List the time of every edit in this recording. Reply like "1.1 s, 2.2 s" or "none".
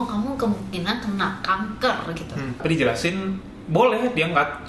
2.6 s